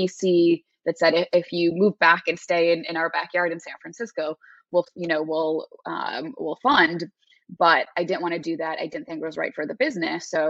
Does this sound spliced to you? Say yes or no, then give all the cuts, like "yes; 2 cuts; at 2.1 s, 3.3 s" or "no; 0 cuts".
no; 0 cuts